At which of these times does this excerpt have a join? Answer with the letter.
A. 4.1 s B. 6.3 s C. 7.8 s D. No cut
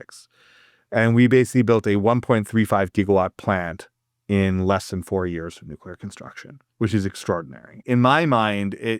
C